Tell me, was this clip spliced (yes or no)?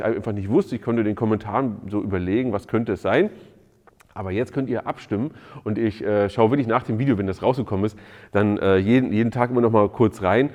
no